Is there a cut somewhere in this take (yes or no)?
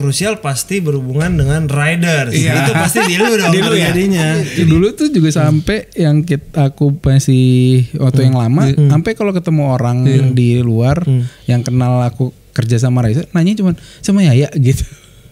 yes